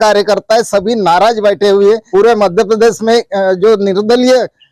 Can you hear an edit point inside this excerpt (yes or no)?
yes